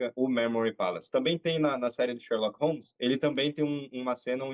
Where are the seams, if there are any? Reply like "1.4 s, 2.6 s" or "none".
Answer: none